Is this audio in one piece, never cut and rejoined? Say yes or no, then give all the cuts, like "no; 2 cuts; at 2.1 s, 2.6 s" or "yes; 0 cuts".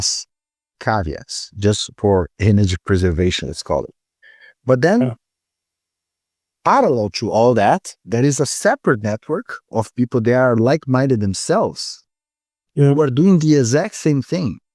yes; 0 cuts